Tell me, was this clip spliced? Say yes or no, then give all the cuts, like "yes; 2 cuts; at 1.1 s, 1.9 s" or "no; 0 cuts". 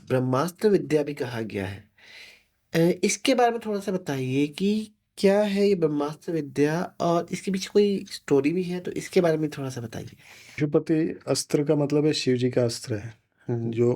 yes; 1 cut; at 10.6 s